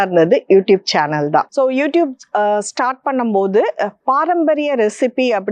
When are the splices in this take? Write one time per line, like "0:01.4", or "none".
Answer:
0:01.5